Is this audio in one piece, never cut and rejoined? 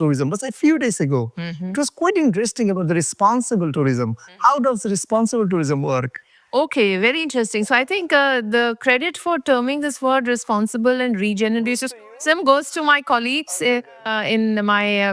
yes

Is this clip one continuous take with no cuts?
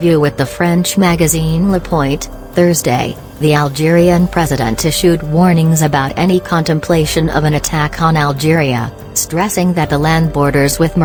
yes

